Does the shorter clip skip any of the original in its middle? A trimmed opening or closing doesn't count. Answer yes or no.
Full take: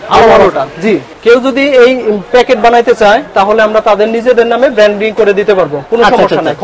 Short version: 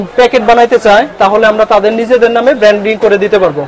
no